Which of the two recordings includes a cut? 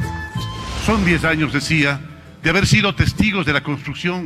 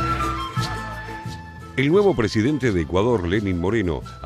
second; 1 cut; at 1.3 s

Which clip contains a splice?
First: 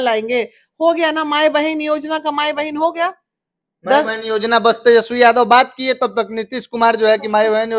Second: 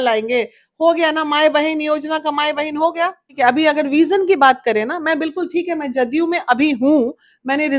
second; 1 cut; at 3.2 s

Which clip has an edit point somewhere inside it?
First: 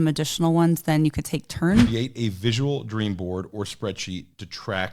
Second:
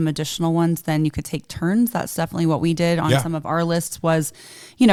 first; 1 cut; at 1.9 s

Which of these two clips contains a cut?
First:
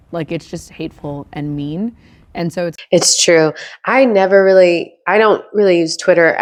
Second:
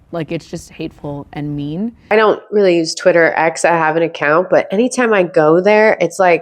second; 1 cut; at 2.0 s

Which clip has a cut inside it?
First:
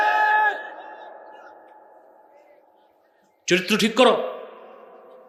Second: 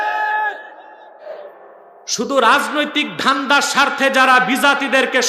second; 1 cut; at 1.3 s

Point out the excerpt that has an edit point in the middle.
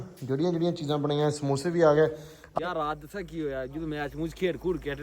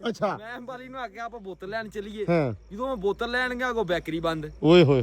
first; 1 cut; at 2.4 s

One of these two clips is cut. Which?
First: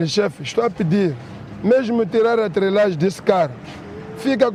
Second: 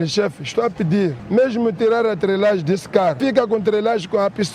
second; 2 cuts; at 1.2 s, 3.2 s

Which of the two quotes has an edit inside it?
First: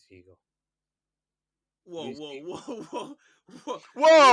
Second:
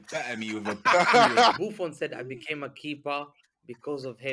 second; 1 cut; at 1.6 s

